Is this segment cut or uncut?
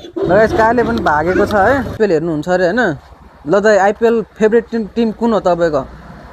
cut